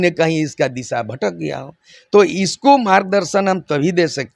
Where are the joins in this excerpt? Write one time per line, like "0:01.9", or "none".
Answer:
none